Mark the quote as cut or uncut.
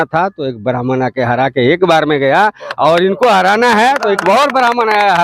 uncut